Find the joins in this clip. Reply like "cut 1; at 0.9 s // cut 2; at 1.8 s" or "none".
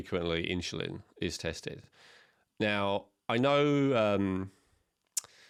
none